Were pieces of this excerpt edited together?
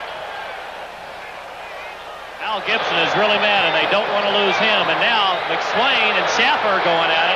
no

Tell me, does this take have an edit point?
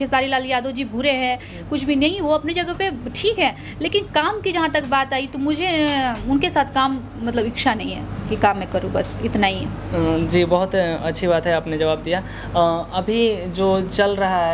no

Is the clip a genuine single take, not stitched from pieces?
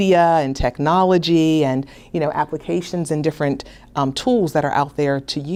yes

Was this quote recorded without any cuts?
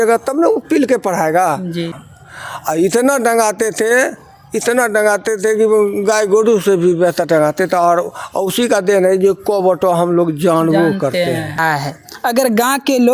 no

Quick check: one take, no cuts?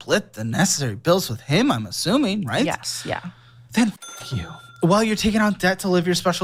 yes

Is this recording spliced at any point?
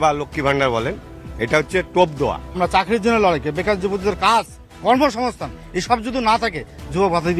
no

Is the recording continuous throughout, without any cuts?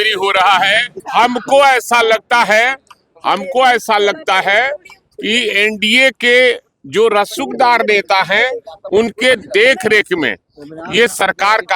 no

